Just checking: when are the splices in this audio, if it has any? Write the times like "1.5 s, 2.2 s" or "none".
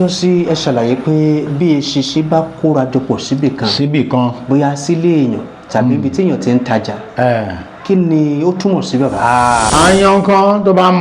9.7 s